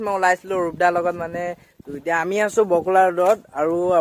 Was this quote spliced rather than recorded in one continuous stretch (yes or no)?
no